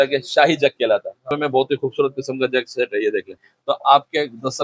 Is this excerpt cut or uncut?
cut